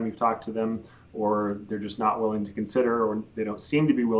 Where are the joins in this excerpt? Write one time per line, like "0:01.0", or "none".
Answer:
none